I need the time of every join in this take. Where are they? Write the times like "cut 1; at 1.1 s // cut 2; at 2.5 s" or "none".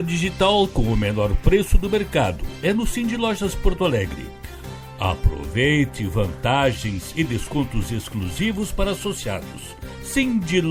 none